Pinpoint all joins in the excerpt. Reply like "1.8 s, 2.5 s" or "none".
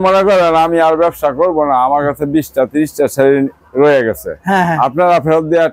none